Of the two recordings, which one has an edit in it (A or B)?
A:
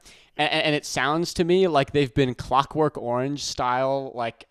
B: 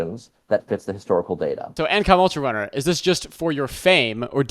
B